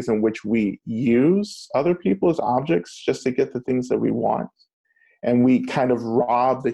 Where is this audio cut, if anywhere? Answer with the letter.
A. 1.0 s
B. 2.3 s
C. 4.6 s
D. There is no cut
D